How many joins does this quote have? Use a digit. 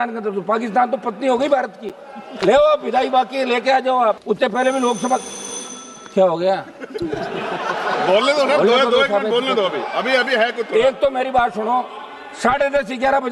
1